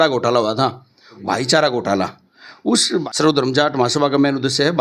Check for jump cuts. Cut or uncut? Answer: cut